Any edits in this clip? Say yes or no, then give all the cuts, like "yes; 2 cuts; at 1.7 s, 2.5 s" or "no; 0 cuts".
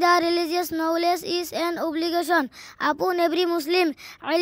no; 0 cuts